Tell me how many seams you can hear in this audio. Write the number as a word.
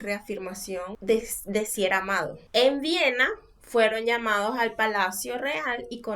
two